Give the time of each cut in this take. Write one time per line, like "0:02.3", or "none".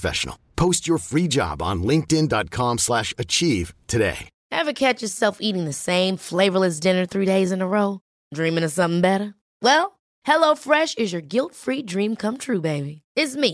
0:04.3